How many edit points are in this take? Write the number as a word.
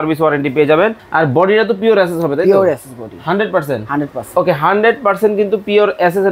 one